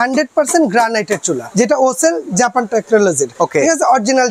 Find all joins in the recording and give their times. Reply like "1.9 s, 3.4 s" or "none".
1.4 s, 3.3 s